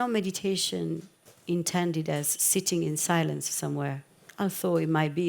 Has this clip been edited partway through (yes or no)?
yes